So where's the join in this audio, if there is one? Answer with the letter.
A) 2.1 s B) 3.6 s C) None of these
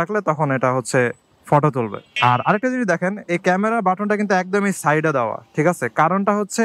C